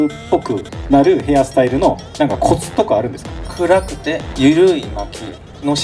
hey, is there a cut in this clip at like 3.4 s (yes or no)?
yes